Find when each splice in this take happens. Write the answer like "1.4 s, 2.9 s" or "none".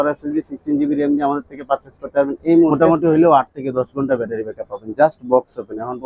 2.7 s